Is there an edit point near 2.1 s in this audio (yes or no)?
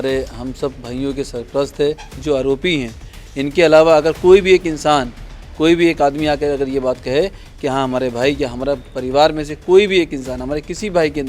yes